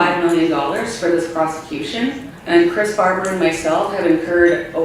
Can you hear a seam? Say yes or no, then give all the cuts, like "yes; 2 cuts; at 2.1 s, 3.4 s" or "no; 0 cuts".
yes; 1 cut; at 2.3 s